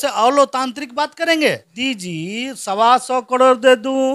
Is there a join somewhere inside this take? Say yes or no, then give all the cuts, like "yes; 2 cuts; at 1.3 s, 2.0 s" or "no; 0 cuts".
yes; 1 cut; at 1.7 s